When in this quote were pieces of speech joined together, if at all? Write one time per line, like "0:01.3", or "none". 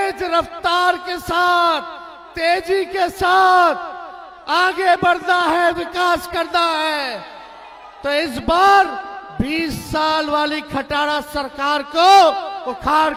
none

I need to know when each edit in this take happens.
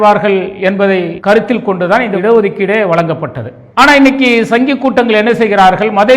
0:01.1

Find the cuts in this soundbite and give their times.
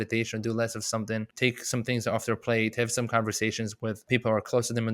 0:01.3
0:04.0

